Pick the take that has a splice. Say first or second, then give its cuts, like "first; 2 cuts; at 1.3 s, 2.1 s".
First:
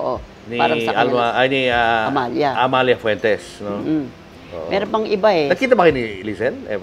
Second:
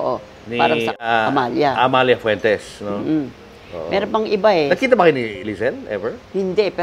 second; 1 cut; at 1.0 s